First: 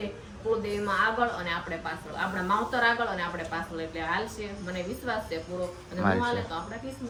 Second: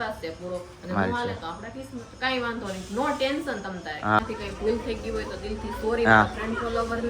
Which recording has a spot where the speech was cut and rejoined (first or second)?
second